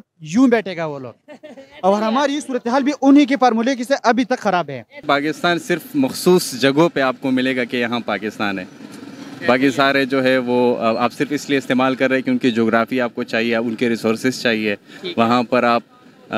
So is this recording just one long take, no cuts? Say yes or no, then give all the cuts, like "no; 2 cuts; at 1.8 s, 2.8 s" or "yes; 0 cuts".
no; 1 cut; at 5.0 s